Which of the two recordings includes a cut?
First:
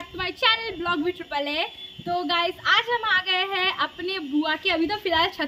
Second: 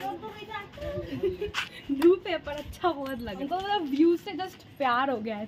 second; 1 cut; at 3.5 s

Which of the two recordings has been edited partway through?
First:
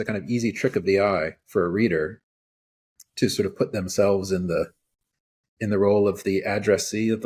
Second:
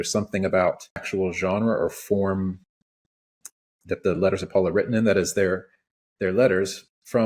second; 1 cut; at 1.1 s

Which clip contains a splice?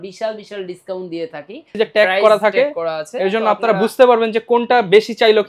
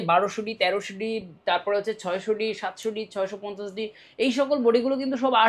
first; 1 cut; at 1.7 s

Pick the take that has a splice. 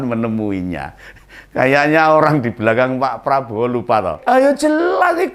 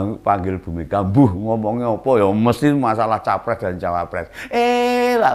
first; 1 cut; at 4.2 s

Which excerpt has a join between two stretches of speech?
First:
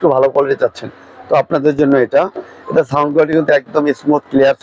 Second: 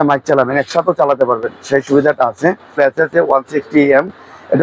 second; 1 cut; at 2.8 s

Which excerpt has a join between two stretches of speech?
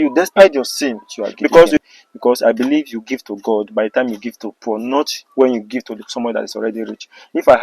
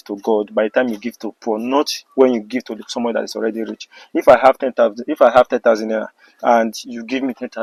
first; 1 cut; at 1.8 s

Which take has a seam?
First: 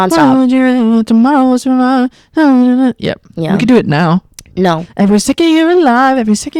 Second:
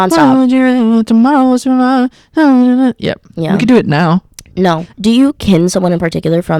second; 1 cut; at 4.9 s

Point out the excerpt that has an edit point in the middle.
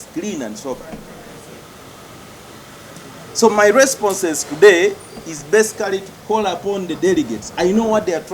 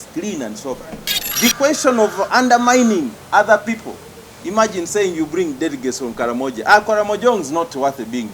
second; 1 cut; at 1.2 s

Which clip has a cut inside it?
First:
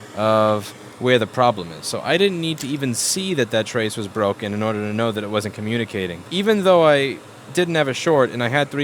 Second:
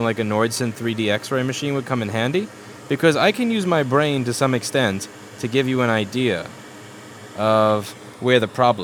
first; 1 cut; at 6.2 s

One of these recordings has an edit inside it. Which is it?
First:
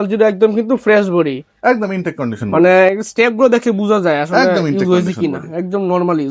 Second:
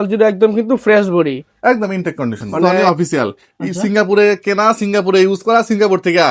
second; 1 cut; at 2.7 s

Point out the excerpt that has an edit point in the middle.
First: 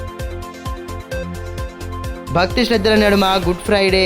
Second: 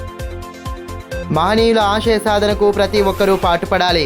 second; 1 cut; at 0.9 s

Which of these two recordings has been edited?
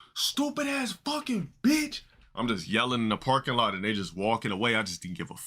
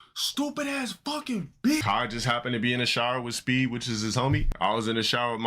second; 2 cuts; at 1.8 s, 4.5 s

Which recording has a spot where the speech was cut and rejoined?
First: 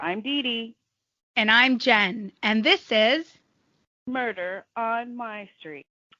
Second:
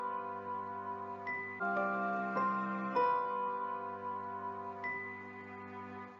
second; 2 cuts; at 1.6 s, 5.0 s

